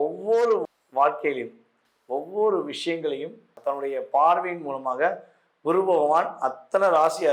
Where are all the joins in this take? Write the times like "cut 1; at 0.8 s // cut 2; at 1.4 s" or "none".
cut 1; at 3.6 s